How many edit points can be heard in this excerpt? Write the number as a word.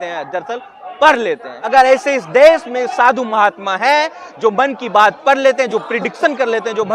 one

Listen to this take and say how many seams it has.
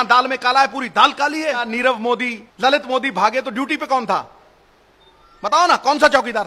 two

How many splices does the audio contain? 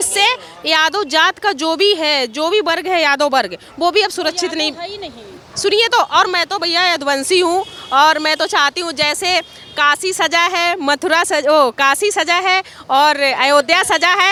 zero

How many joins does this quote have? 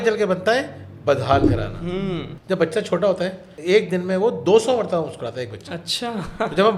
two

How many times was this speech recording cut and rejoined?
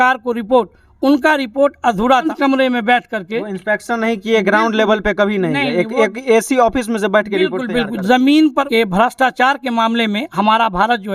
two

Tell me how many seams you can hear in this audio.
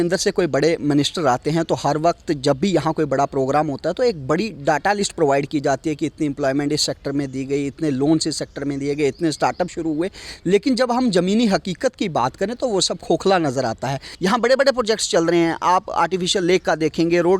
one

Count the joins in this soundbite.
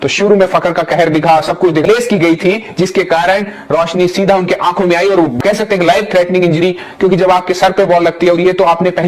two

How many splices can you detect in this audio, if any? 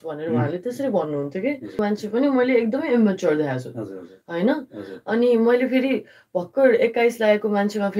one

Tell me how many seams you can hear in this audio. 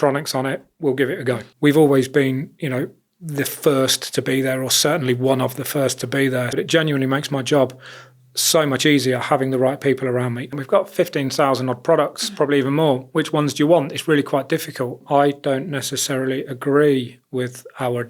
four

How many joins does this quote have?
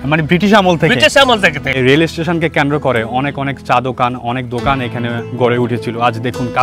one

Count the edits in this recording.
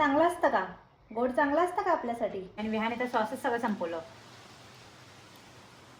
one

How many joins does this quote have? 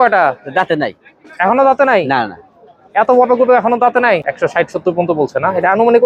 one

